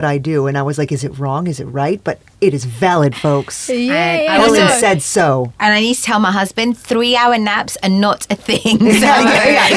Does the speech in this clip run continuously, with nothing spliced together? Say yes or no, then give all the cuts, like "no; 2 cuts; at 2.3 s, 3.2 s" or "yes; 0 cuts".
yes; 0 cuts